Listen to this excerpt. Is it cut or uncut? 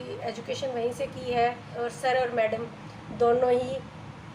cut